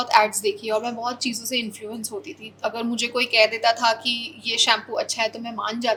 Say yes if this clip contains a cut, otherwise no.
no